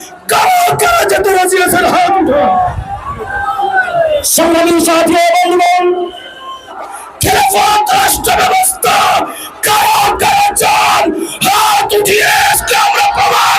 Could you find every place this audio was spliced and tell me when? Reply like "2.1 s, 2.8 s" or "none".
2.7 s, 6.5 s